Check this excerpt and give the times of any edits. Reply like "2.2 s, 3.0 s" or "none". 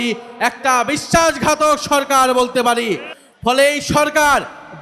3.1 s